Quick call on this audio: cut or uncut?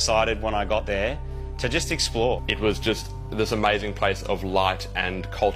uncut